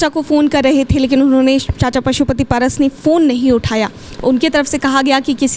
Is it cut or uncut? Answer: uncut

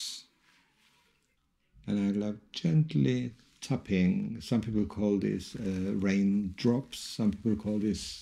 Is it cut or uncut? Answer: cut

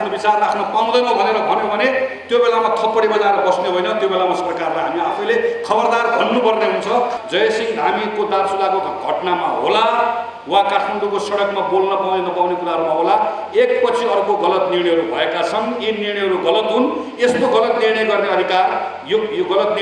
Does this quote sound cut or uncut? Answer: cut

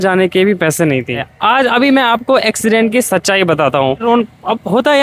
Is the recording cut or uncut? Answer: cut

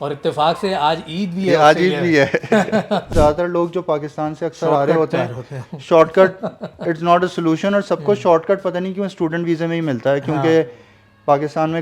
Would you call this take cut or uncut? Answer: cut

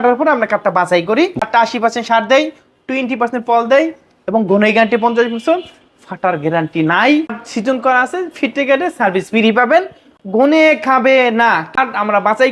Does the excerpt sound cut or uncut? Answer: cut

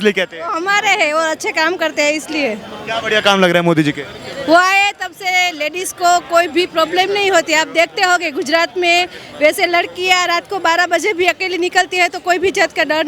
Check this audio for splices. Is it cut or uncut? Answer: uncut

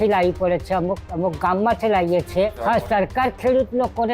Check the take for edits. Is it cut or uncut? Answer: cut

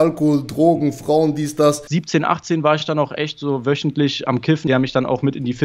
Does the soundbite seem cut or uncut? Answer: cut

